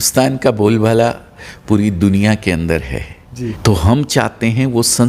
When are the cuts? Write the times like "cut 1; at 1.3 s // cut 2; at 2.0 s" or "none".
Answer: cut 1; at 3.6 s

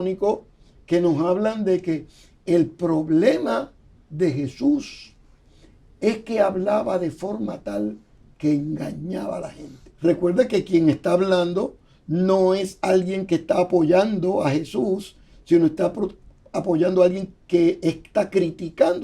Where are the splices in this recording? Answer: cut 1; at 9.8 s

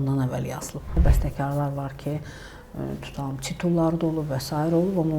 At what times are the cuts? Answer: cut 1; at 1.0 s

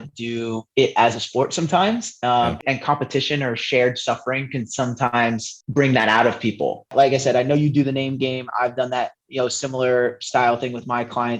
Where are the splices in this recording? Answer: cut 1; at 2.6 s // cut 2; at 6.9 s

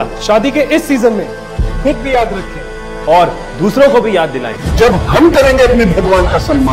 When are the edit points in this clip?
none

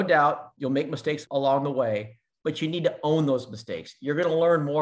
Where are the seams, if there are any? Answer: cut 1; at 1.2 s

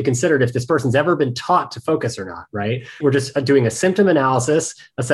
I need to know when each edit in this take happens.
cut 1; at 3.0 s

